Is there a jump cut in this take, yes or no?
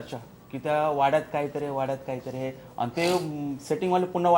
no